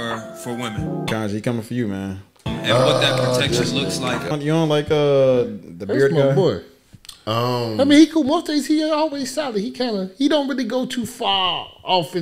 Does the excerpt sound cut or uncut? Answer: cut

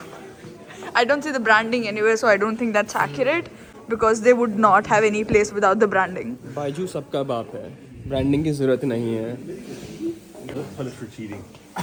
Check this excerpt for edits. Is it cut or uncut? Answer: uncut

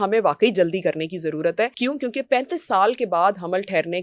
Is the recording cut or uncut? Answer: cut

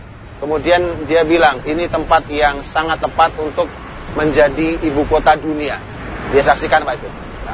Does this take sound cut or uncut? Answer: cut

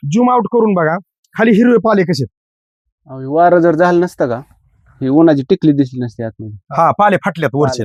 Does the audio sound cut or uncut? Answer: uncut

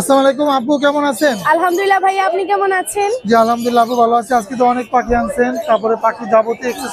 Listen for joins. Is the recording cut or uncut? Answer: uncut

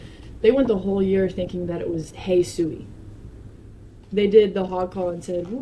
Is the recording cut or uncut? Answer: uncut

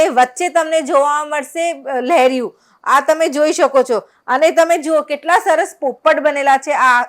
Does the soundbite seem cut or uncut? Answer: uncut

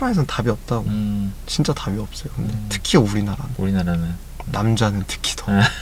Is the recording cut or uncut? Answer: uncut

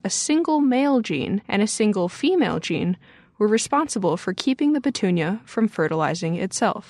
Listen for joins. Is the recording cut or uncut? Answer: uncut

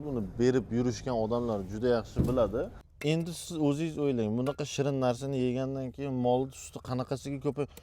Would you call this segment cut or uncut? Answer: cut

